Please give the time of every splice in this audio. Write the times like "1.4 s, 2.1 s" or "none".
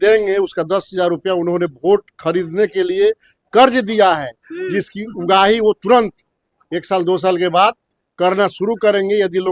none